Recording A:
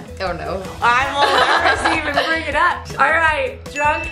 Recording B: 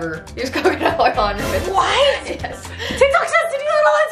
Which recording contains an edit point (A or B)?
A